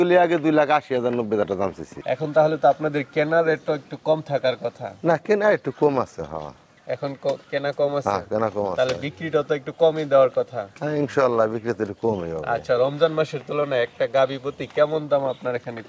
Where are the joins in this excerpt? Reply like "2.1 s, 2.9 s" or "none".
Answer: 1.9 s